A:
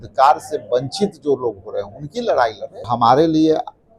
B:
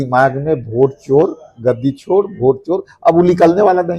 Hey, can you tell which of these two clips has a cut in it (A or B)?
A